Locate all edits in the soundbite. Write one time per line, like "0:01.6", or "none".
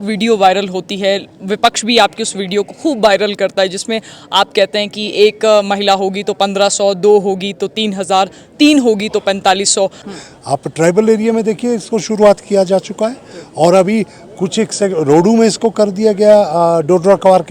0:10.0